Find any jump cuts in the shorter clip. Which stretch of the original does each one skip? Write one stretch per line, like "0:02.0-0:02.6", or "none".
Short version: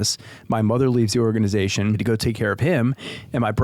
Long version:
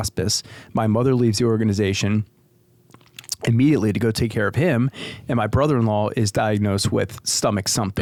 0:02.3-0:04.0